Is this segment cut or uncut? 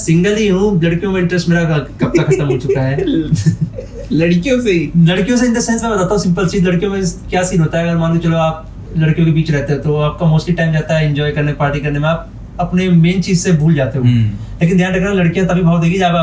uncut